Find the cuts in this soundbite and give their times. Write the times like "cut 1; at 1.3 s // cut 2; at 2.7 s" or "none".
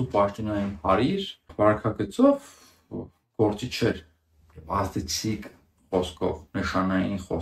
cut 1; at 1.5 s